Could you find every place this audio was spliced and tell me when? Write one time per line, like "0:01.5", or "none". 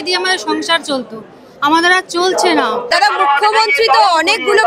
0:02.9